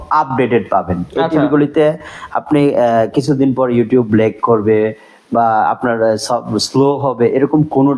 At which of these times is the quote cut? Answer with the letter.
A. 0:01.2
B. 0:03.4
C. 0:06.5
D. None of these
D